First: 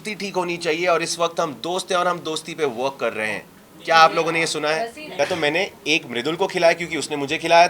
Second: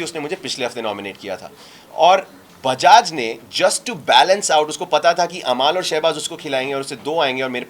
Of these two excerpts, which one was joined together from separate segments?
first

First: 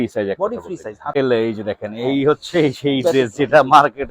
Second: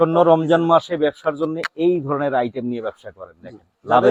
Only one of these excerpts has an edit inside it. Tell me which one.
first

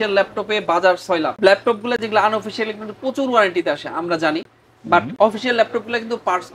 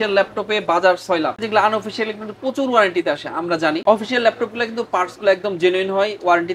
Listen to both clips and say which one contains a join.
second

